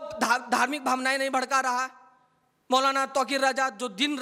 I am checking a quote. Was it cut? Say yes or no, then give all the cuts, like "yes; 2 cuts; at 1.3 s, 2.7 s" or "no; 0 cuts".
no; 0 cuts